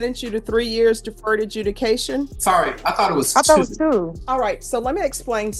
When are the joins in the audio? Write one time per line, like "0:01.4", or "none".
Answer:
0:02.3
0:04.2